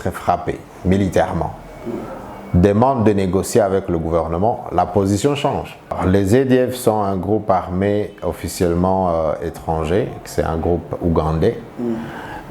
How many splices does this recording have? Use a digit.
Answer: 1